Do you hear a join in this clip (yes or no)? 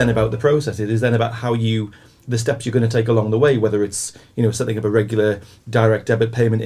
no